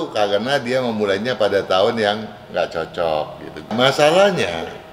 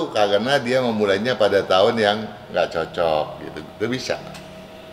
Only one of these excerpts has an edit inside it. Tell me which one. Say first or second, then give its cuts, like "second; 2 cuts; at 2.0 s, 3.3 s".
first; 1 cut; at 3.7 s